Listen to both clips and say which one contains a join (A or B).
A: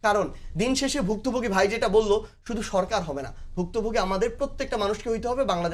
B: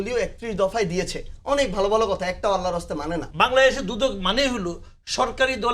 B